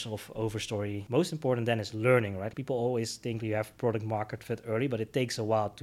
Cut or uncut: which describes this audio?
cut